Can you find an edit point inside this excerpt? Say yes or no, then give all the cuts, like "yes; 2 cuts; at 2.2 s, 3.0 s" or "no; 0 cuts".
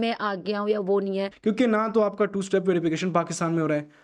yes; 1 cut; at 1.3 s